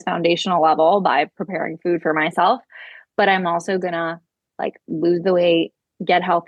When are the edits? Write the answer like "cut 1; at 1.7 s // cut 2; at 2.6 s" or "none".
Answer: none